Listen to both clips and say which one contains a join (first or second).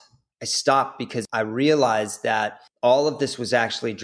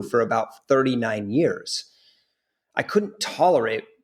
first